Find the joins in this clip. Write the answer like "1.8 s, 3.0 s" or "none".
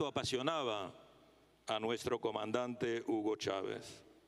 2.1 s